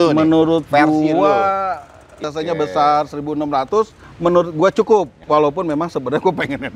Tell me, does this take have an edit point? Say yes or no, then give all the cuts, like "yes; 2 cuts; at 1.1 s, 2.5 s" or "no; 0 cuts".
yes; 3 cuts; at 2.2 s, 4.0 s, 5.2 s